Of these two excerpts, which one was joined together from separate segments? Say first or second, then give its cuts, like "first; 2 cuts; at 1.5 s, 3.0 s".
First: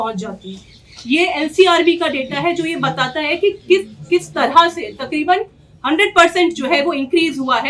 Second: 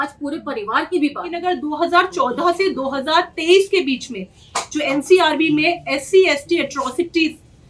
second; 1 cut; at 1.4 s